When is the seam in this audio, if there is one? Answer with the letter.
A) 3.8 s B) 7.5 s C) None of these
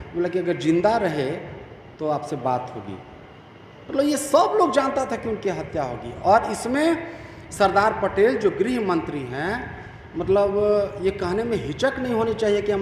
C